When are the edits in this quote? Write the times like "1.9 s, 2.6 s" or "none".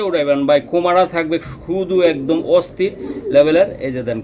none